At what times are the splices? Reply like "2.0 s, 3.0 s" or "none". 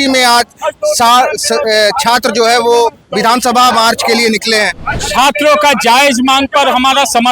4.9 s